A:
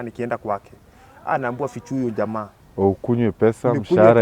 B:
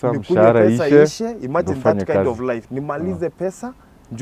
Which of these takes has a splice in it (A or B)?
A